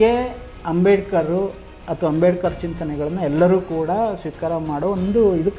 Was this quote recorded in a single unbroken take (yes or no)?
yes